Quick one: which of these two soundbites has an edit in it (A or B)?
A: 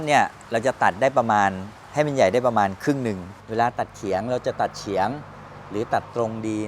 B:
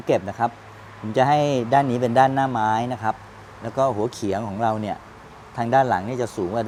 A